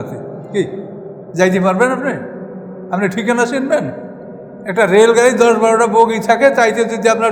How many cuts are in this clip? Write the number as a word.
zero